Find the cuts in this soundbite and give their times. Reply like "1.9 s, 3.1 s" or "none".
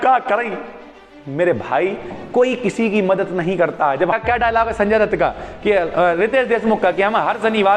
4.2 s

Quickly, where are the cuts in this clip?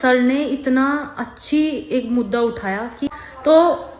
3.1 s

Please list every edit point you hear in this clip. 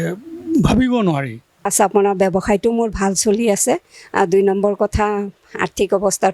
1.7 s

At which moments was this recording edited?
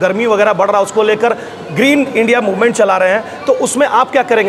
none

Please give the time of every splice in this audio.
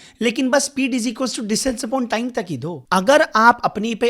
2.7 s

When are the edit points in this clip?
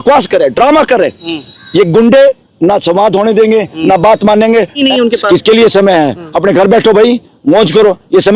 4.8 s

